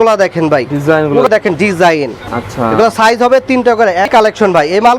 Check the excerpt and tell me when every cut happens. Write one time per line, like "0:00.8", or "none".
0:01.3
0:04.1

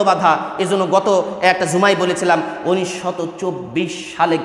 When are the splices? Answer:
none

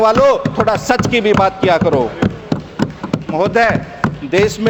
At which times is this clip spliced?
none

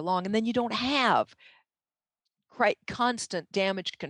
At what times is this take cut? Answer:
none

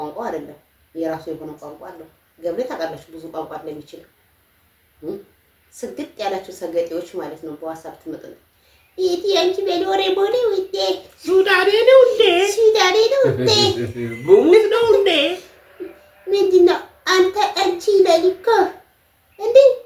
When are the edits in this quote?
none

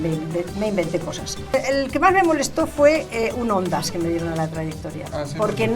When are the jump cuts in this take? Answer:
0:01.5

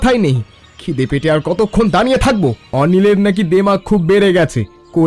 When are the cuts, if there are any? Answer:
0:02.6

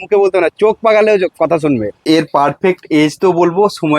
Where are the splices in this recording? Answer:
0:02.0

